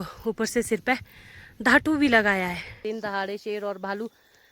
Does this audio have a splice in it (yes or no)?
yes